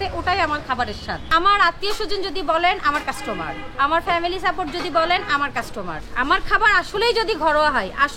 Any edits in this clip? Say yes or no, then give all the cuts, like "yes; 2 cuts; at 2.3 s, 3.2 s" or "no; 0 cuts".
yes; 2 cuts; at 1.2 s, 6.1 s